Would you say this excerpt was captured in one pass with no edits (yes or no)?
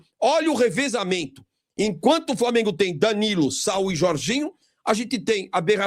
yes